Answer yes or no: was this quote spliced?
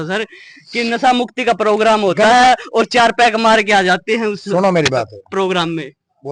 no